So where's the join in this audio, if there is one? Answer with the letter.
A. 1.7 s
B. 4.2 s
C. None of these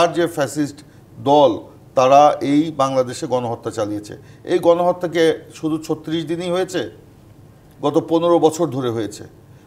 B